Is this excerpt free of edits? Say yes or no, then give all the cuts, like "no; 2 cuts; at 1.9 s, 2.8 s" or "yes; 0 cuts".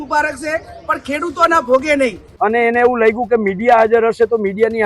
no; 1 cut; at 2.2 s